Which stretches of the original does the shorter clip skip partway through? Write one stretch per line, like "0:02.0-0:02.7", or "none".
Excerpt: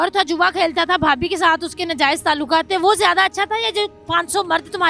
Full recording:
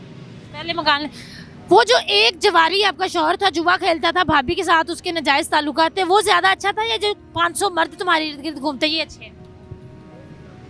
none